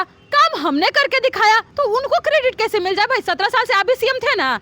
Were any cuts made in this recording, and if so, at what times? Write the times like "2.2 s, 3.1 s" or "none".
1.7 s